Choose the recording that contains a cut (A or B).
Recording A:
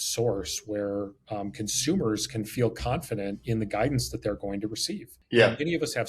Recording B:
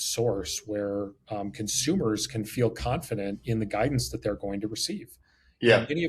A